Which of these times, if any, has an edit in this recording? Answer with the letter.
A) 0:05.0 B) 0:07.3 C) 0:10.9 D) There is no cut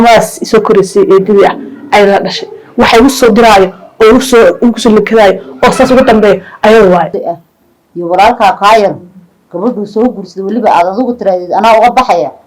B